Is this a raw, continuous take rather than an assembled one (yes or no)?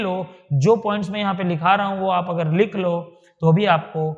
yes